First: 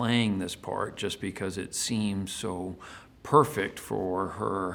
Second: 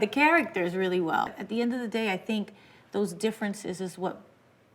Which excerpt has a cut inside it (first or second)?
second